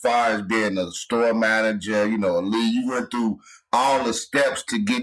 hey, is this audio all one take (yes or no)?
yes